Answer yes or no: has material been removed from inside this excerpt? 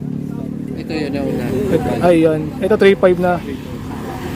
no